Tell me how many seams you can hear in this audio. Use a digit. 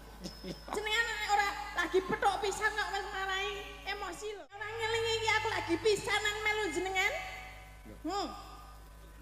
1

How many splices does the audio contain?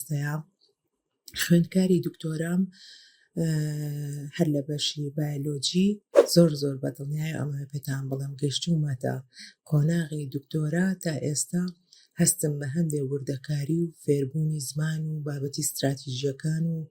1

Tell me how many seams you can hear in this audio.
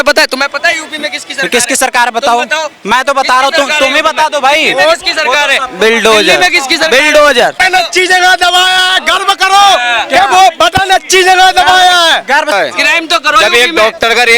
2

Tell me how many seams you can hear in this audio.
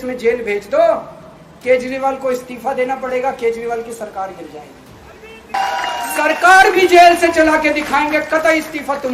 1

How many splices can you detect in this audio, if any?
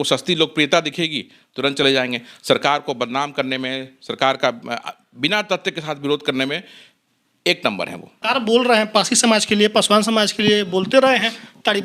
1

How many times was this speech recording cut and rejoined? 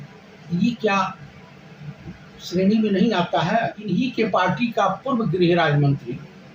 1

